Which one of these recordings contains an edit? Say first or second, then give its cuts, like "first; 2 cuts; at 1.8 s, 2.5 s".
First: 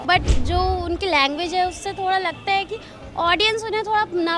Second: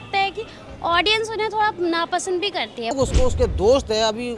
second; 1 cut; at 2.9 s